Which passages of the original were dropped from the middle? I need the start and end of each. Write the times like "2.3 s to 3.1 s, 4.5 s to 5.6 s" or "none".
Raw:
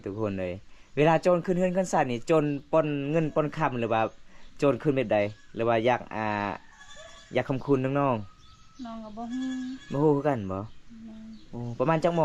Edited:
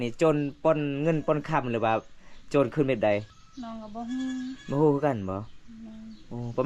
5.4 s to 8.6 s